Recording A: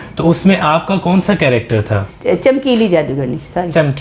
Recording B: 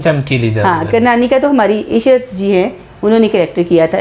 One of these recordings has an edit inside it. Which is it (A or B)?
A